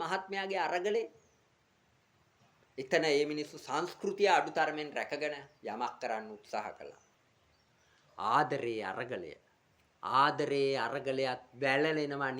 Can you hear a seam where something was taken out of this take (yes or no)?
yes